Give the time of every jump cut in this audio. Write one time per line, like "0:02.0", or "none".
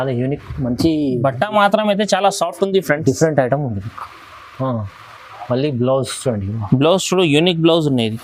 none